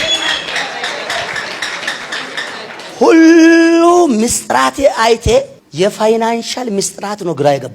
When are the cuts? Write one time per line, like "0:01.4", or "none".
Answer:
0:05.6